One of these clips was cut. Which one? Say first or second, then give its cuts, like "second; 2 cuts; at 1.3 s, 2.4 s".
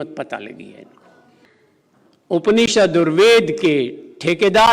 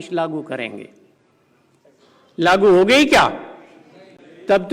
first; 1 cut; at 1.4 s